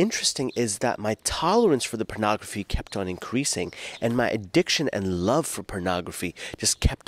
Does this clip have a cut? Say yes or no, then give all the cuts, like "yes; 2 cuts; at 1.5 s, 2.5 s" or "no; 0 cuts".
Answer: no; 0 cuts